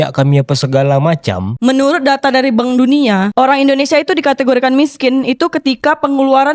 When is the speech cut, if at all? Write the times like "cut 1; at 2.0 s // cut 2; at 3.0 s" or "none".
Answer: cut 1; at 1.5 s // cut 2; at 3.3 s